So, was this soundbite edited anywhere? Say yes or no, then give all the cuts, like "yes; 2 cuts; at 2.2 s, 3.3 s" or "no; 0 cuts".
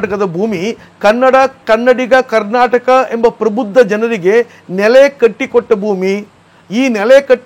no; 0 cuts